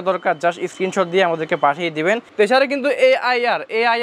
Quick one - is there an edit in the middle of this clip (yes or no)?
yes